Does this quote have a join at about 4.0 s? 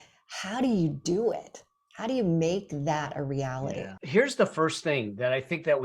yes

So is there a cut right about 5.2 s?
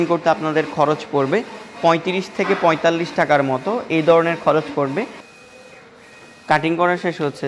yes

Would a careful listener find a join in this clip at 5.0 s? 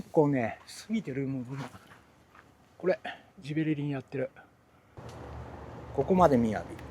yes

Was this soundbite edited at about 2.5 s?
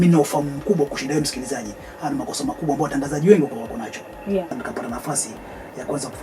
no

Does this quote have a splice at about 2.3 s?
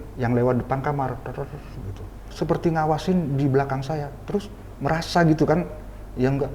yes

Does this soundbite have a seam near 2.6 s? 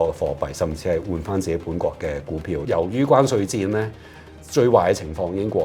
yes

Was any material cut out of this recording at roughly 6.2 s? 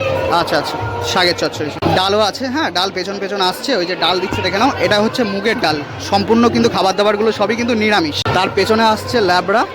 no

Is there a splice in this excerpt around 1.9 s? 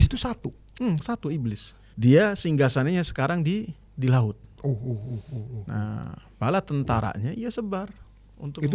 yes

